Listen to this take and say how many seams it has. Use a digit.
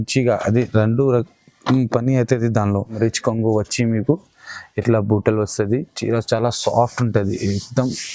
1